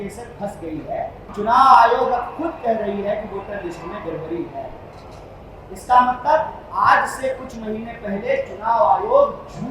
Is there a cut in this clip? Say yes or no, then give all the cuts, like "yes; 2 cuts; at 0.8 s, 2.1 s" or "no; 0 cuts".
yes; 1 cut; at 1.2 s